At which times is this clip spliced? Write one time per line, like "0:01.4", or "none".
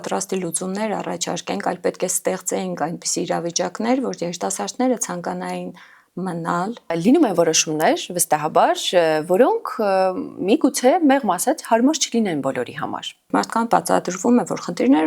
0:06.9
0:13.3